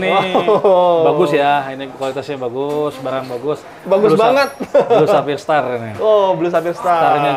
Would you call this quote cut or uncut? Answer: uncut